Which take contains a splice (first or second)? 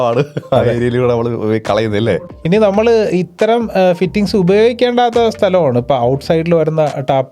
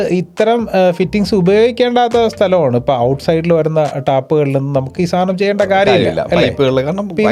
first